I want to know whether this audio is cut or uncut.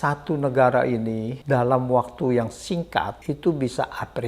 cut